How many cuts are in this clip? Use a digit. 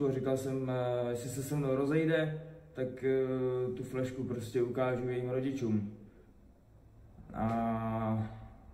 0